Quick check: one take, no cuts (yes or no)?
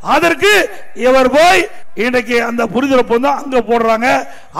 no